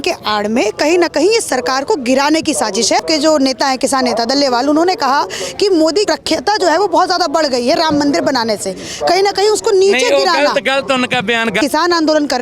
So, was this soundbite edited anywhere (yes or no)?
yes